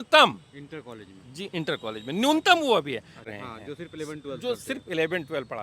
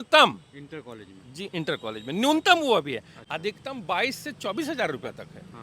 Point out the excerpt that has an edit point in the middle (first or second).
first